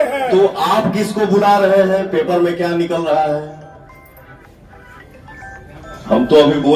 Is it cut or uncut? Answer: uncut